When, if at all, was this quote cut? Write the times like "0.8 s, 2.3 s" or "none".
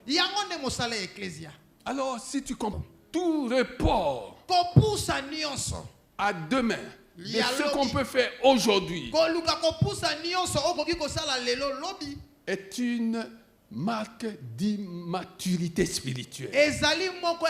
2.8 s